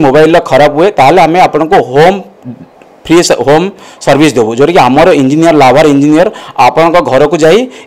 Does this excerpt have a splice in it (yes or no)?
no